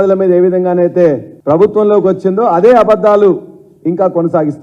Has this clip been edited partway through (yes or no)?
yes